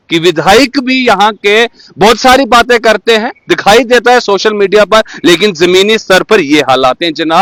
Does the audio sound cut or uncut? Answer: uncut